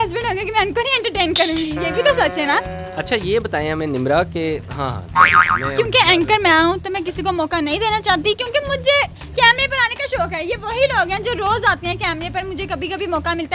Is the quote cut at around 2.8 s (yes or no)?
yes